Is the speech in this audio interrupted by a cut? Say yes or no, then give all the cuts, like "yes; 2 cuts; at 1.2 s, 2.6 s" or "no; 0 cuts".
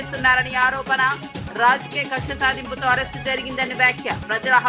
no; 0 cuts